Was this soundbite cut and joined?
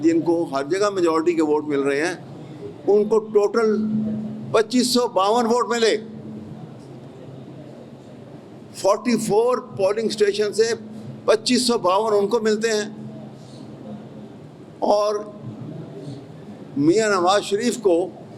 no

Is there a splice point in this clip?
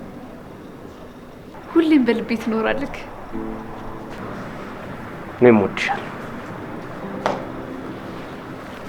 no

